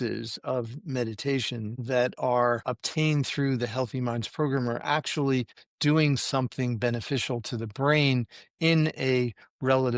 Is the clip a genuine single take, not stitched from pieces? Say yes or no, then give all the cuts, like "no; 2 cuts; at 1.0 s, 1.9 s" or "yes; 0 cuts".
no; 2 cuts; at 1.8 s, 2.6 s